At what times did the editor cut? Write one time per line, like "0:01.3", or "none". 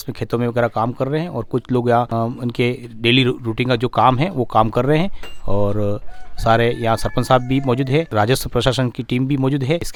none